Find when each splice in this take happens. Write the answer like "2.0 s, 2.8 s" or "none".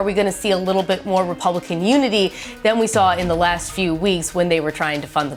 none